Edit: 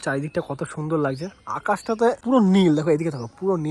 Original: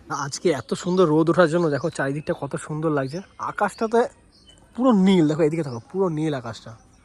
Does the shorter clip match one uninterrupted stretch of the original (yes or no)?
no